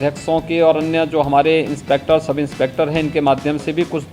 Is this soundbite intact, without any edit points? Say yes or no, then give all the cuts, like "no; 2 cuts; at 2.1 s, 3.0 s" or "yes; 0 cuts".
yes; 0 cuts